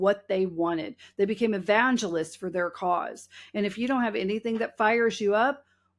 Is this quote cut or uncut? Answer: uncut